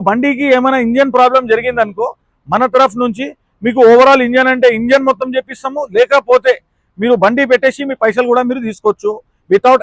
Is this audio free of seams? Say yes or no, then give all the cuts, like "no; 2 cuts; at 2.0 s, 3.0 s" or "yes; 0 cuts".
yes; 0 cuts